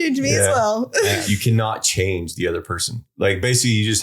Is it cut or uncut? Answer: cut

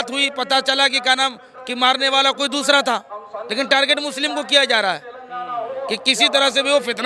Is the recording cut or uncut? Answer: uncut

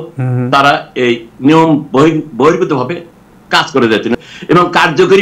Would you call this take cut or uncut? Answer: cut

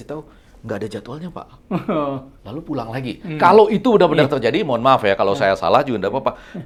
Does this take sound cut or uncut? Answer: uncut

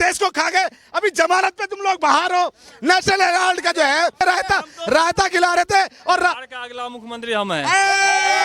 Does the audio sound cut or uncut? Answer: cut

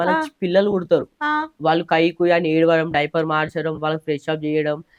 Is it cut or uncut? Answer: uncut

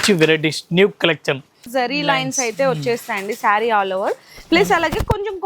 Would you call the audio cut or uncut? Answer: cut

